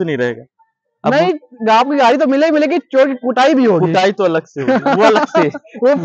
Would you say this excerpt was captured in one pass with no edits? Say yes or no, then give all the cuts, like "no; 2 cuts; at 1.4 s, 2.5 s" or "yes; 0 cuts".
yes; 0 cuts